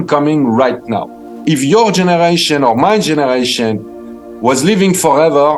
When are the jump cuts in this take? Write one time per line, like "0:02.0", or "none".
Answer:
0:01.4

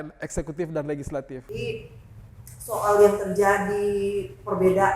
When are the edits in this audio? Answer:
0:01.5

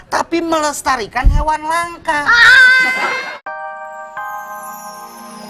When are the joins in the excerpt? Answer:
0:03.1

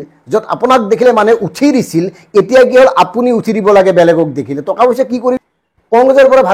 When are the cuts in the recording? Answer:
0:05.4

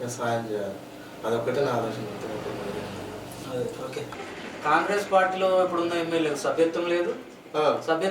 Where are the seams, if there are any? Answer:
0:04.1

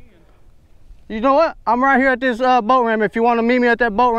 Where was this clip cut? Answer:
none

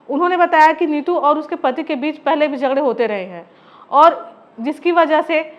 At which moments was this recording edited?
none

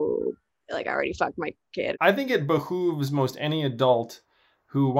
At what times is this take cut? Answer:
0:01.9

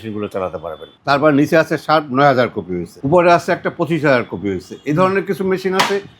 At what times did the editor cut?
0:00.9
0:02.9

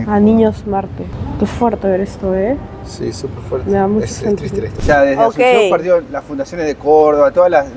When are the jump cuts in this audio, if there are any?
0:01.1
0:04.8

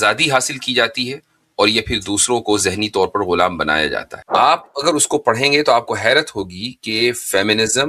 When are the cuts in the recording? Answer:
0:04.2

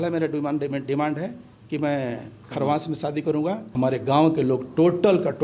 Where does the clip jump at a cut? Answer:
0:03.7

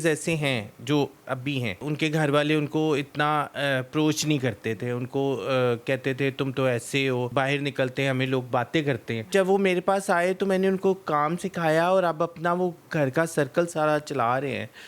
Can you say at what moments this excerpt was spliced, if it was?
0:01.8
0:07.3
0:09.3

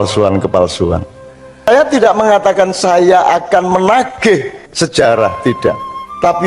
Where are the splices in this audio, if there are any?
0:01.8

